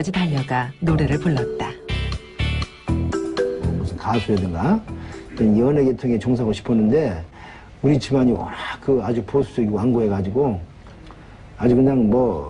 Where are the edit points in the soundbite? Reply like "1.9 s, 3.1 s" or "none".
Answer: 3.3 s

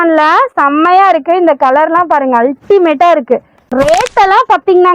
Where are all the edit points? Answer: 3.7 s

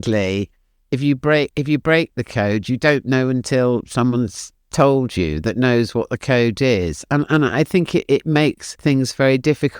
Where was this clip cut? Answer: 8.7 s

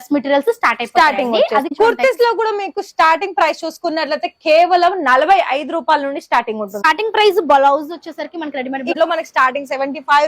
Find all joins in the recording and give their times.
1.7 s, 6.8 s, 8.9 s

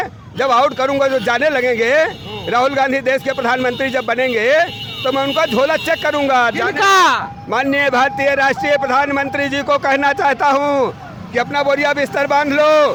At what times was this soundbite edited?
none

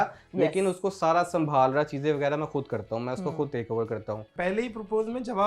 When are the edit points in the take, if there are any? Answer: 4.3 s

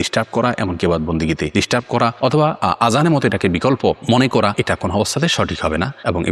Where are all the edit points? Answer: none

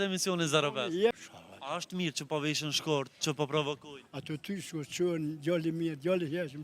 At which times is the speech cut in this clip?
1.1 s

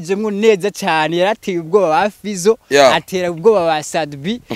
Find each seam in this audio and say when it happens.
none

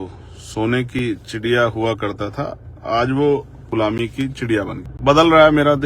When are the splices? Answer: 3.7 s, 4.9 s

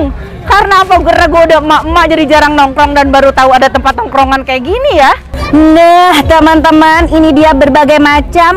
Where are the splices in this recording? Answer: 5.3 s

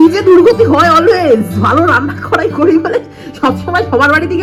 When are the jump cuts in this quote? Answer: none

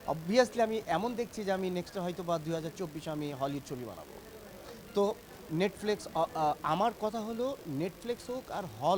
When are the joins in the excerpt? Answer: none

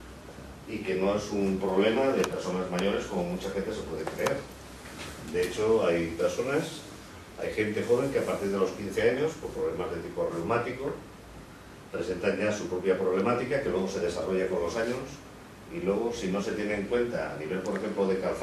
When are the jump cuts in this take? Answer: 11.1 s

